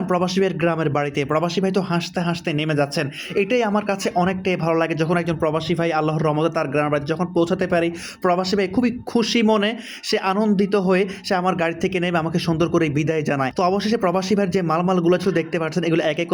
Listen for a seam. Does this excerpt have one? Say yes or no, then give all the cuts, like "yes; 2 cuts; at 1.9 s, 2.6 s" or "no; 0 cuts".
no; 0 cuts